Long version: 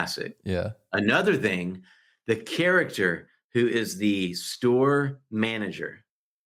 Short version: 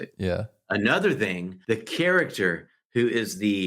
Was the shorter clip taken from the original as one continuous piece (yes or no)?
no